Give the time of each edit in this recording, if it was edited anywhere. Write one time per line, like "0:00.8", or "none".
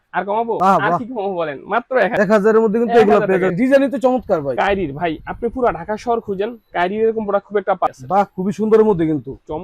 0:03.5
0:07.9